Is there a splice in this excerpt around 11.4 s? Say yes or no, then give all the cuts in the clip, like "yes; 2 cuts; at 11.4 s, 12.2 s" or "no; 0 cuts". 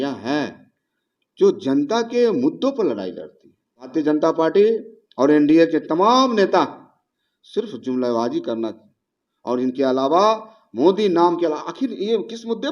no; 1 cut; at 3.9 s